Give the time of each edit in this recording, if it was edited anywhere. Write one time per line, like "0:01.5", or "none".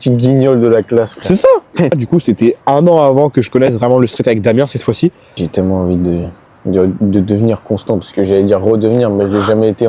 0:01.9
0:05.4